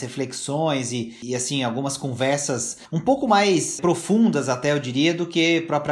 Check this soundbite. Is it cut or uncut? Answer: cut